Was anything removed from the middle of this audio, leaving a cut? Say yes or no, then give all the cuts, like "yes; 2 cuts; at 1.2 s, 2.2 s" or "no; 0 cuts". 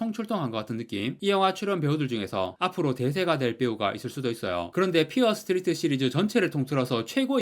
yes; 2 cuts; at 1.2 s, 4.7 s